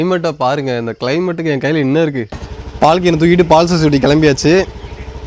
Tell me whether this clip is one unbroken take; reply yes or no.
no